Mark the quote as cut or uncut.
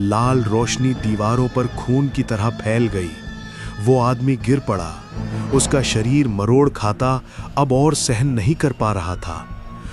uncut